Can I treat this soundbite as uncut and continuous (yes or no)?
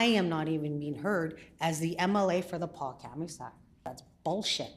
no